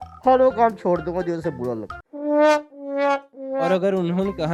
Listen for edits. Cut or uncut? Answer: uncut